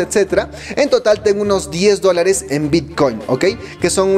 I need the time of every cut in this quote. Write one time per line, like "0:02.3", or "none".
none